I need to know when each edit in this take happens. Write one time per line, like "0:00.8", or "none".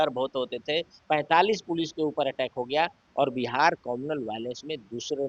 0:01.0